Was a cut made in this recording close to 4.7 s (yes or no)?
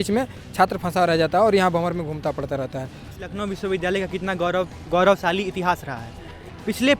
no